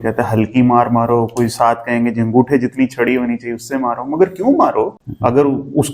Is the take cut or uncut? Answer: cut